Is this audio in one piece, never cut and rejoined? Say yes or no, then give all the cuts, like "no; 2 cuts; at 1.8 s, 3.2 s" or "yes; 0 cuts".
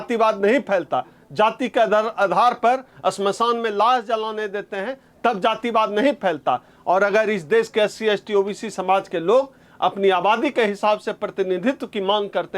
no; 1 cut; at 6.7 s